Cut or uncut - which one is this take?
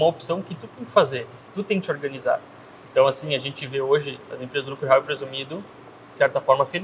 uncut